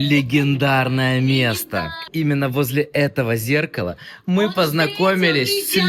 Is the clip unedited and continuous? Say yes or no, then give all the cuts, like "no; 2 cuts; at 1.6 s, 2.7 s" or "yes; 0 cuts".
no; 1 cut; at 2.1 s